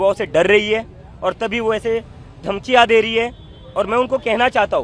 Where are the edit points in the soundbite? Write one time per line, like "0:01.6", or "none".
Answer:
none